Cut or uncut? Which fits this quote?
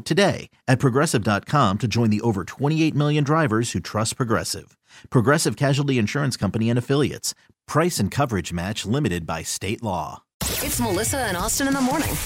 cut